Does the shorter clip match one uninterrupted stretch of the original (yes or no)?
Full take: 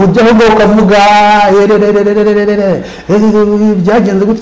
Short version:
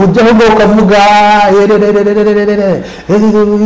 yes